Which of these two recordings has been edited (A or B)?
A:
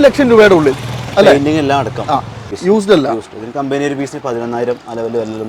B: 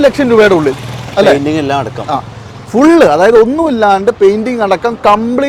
A